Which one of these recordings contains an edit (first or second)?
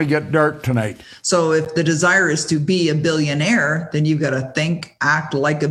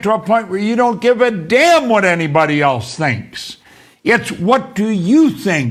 first